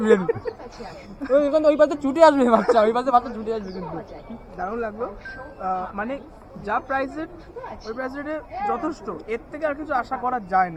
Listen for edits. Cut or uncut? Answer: uncut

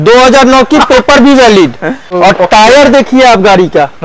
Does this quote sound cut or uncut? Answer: cut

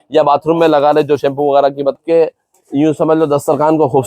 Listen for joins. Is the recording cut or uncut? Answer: cut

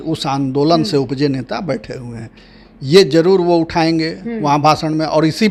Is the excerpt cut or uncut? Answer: uncut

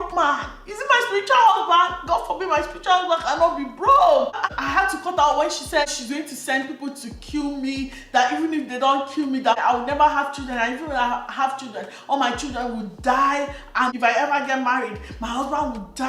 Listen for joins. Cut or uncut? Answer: cut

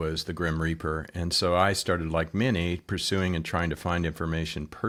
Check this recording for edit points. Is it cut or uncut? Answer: uncut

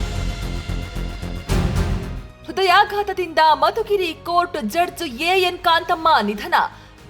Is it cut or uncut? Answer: cut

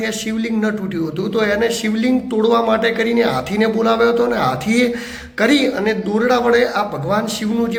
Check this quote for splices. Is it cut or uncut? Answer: uncut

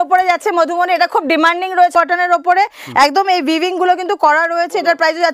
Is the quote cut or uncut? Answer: cut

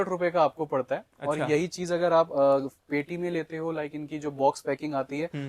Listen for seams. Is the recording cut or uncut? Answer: uncut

